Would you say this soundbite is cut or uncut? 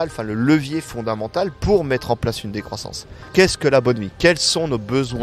cut